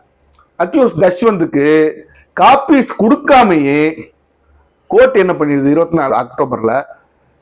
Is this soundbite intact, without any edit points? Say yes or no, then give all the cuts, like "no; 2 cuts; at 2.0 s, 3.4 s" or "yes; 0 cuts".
yes; 0 cuts